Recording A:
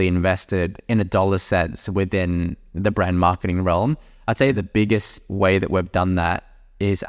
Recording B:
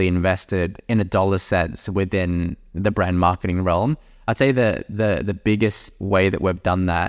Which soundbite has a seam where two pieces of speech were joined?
A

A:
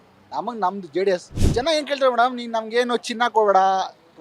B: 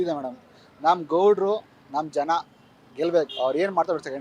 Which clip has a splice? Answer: A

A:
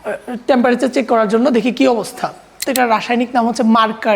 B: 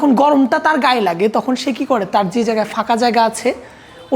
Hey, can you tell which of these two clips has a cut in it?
A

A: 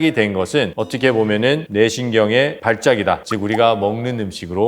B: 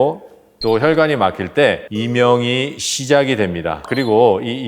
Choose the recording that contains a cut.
A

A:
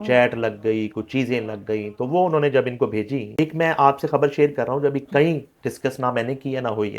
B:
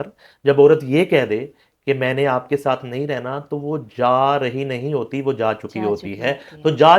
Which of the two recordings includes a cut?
A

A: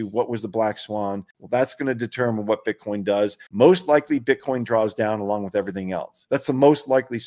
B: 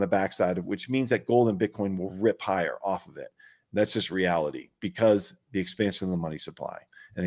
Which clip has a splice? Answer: A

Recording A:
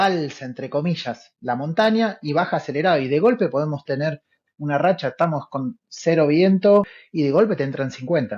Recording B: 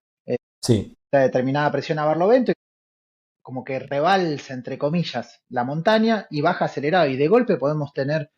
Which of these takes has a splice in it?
A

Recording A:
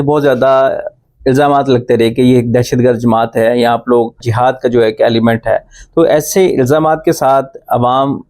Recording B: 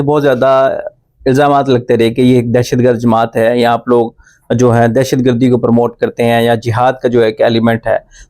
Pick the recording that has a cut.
A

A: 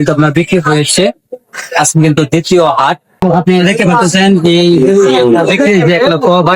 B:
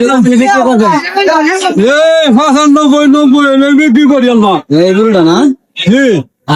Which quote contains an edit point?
A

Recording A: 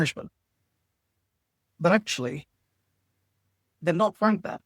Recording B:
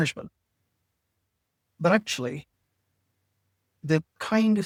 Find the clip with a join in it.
A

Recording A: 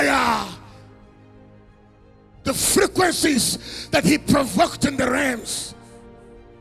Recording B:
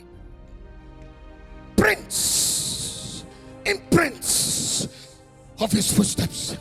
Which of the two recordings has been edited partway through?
A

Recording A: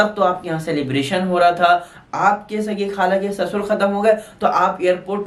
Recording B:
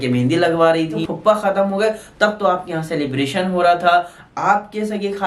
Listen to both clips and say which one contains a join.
B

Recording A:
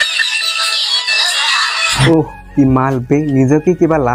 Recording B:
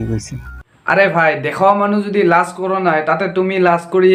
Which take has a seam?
A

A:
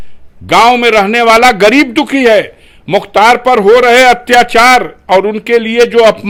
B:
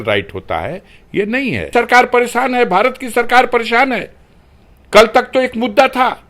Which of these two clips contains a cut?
B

